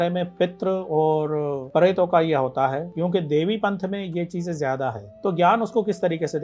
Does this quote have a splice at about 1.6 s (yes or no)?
yes